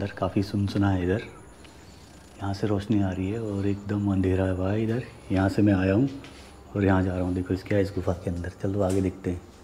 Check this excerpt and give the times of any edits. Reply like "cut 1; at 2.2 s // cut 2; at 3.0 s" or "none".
none